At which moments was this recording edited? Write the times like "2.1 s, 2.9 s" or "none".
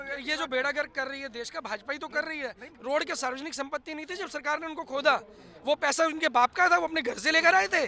2.7 s